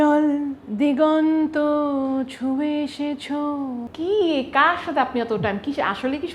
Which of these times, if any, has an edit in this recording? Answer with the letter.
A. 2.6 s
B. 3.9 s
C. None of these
B